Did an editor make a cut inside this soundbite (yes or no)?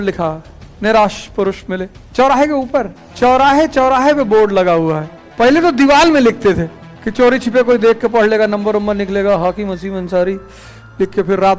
yes